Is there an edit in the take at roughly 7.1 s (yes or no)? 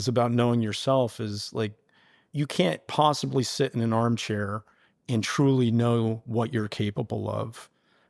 no